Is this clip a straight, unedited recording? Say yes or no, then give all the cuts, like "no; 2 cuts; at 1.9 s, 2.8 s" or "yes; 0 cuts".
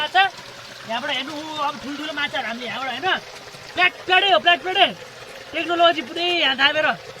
yes; 0 cuts